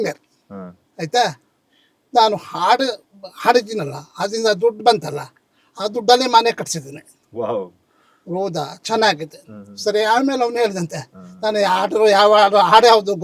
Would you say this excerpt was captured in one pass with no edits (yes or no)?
yes